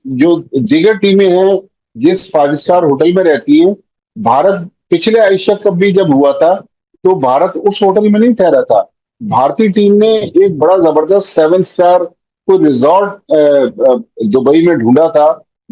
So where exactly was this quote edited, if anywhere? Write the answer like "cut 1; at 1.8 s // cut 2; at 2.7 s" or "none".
none